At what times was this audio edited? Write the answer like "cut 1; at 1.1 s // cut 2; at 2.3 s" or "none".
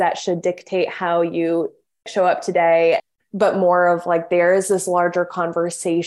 cut 1; at 2.1 s // cut 2; at 3.1 s